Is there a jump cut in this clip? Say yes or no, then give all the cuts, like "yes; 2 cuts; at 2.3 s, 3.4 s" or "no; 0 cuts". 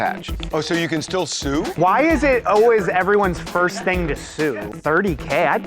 yes; 2 cuts; at 1.7 s, 4.7 s